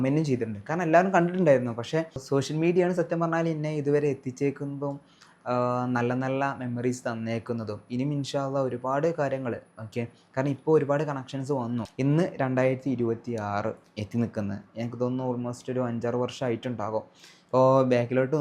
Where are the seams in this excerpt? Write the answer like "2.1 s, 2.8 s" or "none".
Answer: 2.2 s